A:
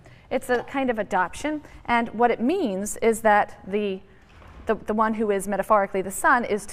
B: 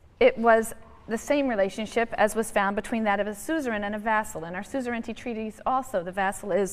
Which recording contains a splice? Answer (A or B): A